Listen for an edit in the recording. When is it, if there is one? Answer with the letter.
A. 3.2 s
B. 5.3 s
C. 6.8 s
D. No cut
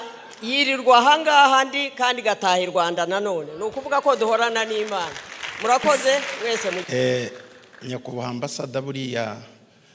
C